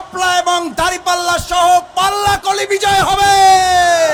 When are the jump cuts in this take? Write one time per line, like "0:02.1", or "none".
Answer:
none